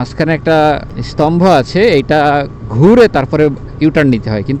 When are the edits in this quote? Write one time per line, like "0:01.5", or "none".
0:01.0